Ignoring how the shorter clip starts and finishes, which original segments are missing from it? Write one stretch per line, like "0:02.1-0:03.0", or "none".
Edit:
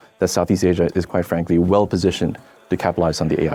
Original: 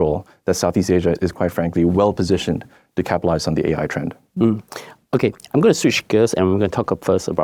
none